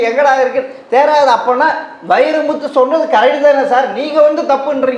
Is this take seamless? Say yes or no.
yes